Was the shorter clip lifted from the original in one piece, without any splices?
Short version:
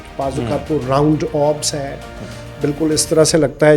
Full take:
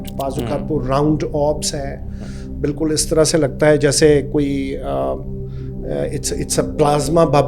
yes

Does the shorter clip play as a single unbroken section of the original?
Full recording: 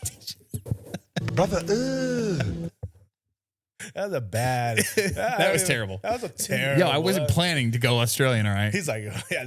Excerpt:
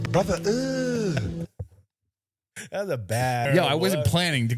no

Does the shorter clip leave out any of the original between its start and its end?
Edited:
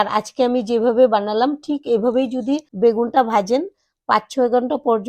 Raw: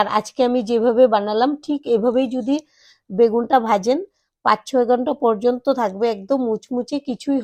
yes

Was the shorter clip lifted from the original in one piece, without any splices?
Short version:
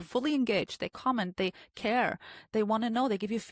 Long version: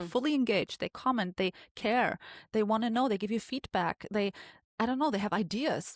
yes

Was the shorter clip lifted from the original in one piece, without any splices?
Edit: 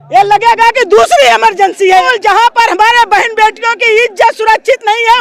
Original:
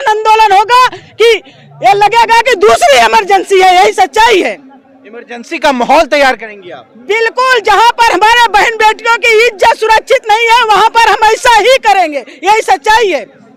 no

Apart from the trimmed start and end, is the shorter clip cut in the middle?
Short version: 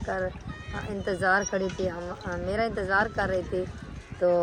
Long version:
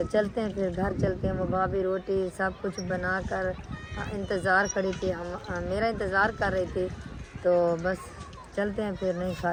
no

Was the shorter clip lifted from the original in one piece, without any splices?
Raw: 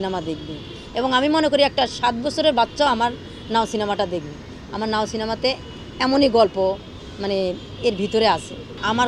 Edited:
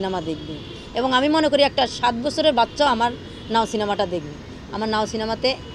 yes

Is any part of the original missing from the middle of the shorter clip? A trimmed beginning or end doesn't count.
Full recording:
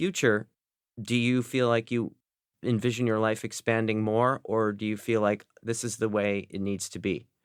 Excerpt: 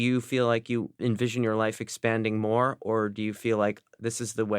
yes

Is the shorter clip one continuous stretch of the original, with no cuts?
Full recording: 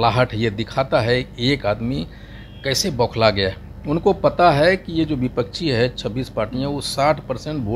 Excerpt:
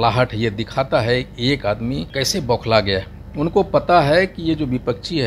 no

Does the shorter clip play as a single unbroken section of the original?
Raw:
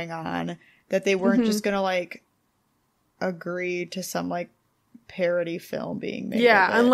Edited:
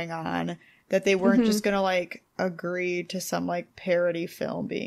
no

